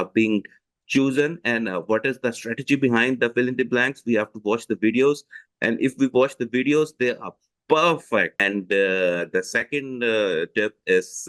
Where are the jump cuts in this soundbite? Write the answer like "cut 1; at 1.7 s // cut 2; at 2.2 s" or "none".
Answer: cut 1; at 8.4 s